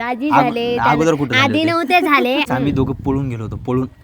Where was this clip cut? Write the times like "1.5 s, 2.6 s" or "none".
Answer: 2.5 s